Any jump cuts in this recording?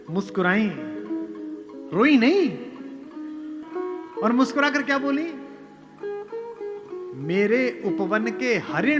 yes; 1 cut; at 3.6 s

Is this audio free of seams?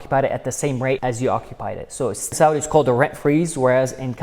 no; 2 cuts; at 1.0 s, 2.3 s

